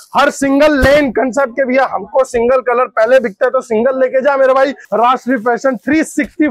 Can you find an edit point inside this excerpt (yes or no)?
yes